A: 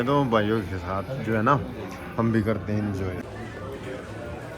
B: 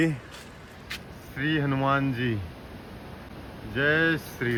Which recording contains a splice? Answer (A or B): A